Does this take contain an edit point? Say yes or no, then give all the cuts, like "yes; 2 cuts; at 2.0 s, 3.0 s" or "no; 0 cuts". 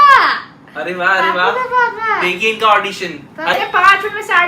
yes; 1 cut; at 3.5 s